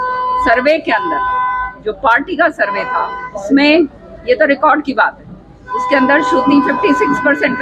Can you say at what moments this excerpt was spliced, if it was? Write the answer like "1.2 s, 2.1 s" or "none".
none